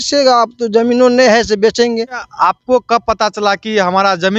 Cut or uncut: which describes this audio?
cut